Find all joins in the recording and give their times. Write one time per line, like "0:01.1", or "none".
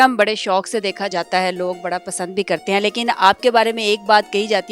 0:01.1